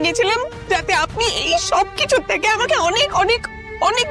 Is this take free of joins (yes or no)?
yes